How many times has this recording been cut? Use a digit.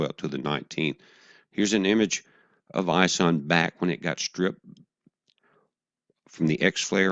0